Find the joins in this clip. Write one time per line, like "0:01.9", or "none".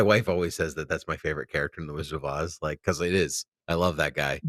none